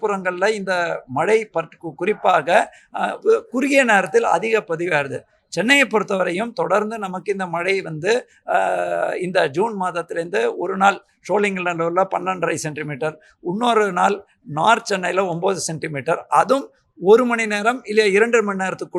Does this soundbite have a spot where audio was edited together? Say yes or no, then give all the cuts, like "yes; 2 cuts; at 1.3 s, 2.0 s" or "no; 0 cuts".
no; 0 cuts